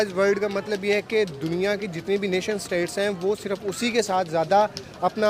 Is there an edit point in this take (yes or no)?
no